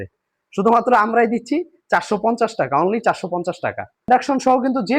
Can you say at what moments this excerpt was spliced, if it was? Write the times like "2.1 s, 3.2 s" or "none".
4.1 s